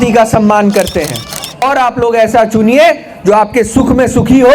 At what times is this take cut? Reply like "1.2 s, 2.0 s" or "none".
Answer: 1.6 s

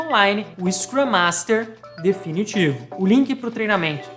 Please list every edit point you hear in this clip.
2.9 s

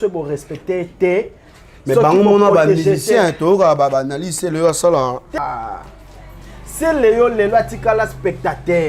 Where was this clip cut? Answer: 5.4 s

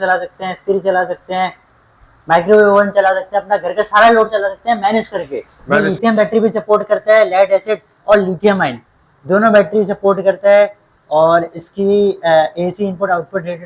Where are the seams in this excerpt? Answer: 5.6 s

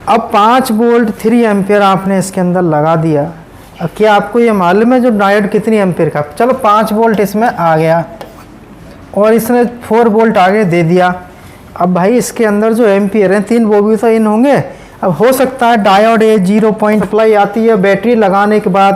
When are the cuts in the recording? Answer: 17.1 s

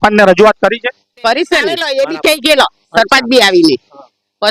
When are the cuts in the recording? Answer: 1.8 s

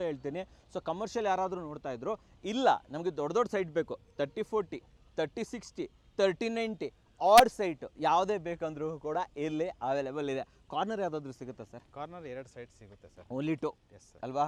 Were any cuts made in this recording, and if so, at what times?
none

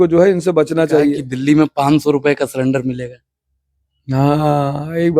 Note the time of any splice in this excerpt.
1.3 s

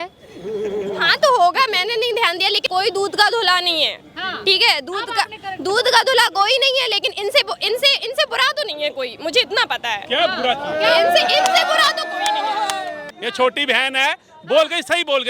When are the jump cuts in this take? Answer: 2.6 s, 13.1 s

